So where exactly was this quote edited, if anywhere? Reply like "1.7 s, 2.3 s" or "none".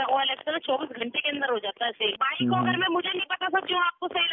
2.2 s